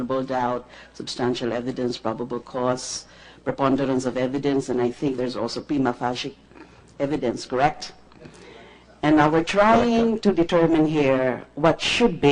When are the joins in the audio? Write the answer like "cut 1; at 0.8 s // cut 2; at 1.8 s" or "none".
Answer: cut 1; at 2.4 s

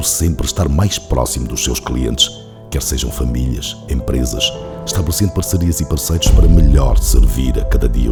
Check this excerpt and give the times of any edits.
none

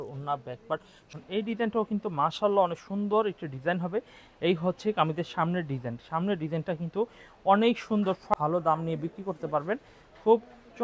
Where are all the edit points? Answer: cut 1; at 1.0 s // cut 2; at 8.3 s

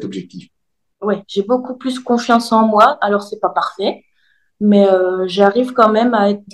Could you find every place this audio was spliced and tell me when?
none

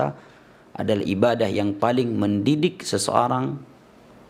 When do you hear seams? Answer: none

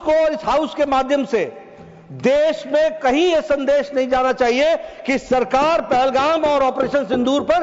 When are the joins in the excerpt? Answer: none

